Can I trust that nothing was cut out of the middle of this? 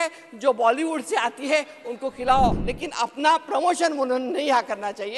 no; 1 cut; at 2.5 s

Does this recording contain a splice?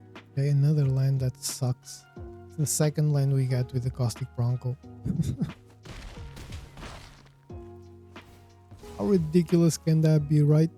yes; 2 cuts; at 7.2 s, 9.0 s

